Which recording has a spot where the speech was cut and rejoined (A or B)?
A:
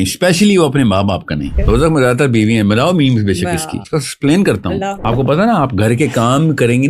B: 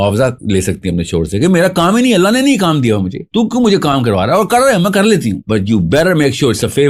A